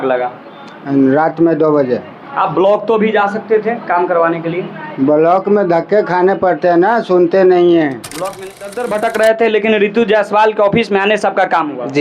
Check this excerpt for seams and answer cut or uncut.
cut